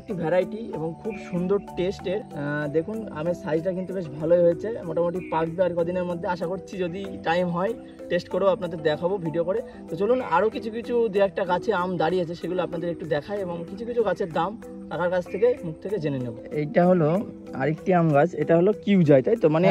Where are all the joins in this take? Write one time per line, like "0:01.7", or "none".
none